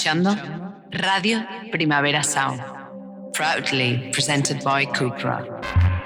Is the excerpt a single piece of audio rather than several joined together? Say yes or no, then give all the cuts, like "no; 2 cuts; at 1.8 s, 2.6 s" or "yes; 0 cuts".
yes; 0 cuts